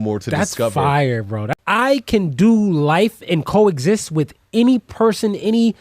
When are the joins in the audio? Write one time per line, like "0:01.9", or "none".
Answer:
0:01.5